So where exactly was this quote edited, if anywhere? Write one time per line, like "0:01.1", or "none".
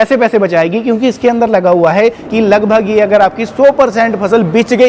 0:02.2